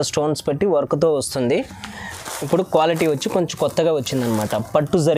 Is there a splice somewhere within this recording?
yes; 1 cut; at 2.2 s

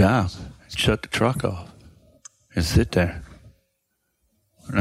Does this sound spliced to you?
no; 0 cuts

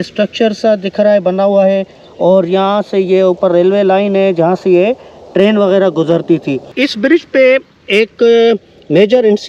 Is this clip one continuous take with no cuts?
no; 1 cut; at 6.8 s

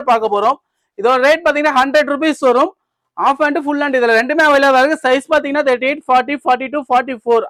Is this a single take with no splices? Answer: yes; 0 cuts

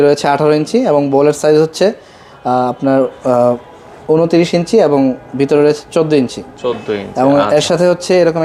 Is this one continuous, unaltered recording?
yes; 0 cuts

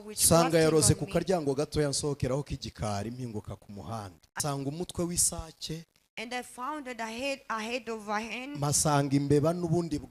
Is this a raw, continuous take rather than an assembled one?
no; 1 cut; at 4.4 s

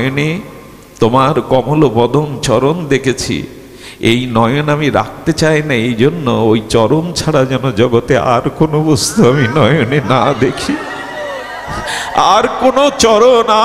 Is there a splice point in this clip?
no; 0 cuts

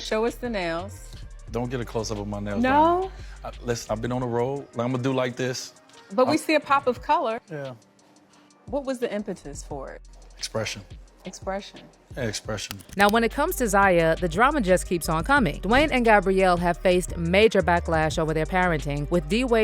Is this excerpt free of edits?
yes; 0 cuts

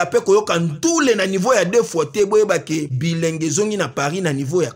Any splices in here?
no; 0 cuts

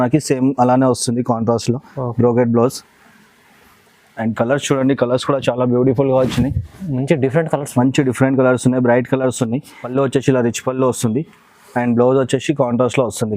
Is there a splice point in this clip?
yes; 1 cut; at 9.7 s

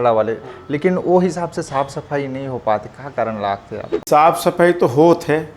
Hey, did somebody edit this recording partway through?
yes; 1 cut; at 4.0 s

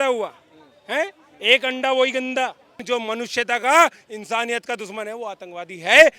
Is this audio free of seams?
no; 1 cut; at 2.7 s

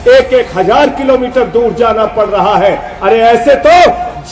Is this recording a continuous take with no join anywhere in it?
yes; 0 cuts

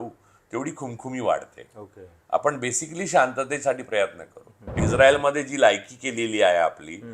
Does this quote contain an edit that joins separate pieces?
yes; 1 cut; at 4.8 s

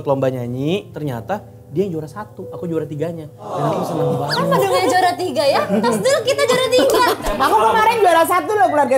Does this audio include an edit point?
yes; 2 cuts; at 0.9 s, 7.2 s

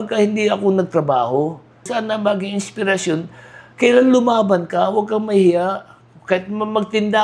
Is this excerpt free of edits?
no; 1 cut; at 1.9 s

